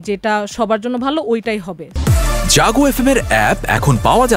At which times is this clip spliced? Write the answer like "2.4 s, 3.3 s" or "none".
1.8 s